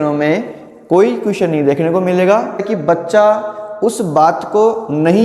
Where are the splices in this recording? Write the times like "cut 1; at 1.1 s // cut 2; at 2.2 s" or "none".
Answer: cut 1; at 2.6 s